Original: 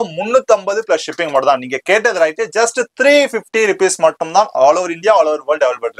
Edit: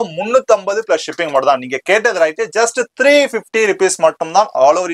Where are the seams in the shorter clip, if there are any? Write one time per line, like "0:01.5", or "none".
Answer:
none